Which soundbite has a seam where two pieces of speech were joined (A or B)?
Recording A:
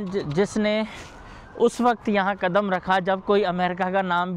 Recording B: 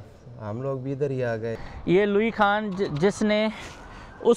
B